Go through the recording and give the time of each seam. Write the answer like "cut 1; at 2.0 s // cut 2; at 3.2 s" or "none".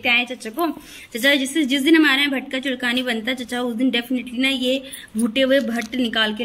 none